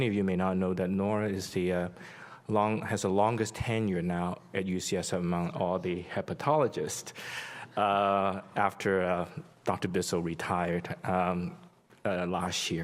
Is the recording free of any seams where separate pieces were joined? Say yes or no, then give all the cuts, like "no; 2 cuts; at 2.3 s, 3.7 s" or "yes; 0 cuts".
yes; 0 cuts